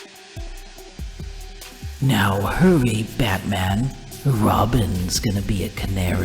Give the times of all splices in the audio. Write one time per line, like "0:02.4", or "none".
0:01.9